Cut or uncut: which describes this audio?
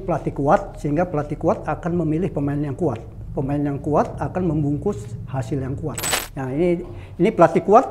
cut